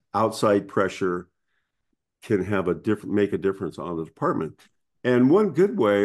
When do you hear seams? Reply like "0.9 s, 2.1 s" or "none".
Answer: none